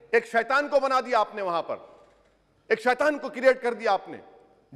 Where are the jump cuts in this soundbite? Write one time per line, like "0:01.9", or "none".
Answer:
none